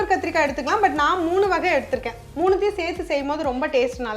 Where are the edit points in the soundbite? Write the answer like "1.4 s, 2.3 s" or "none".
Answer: 2.2 s